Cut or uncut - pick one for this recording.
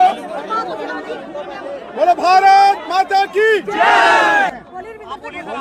uncut